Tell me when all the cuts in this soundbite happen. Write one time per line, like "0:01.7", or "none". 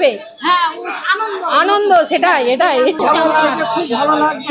0:03.0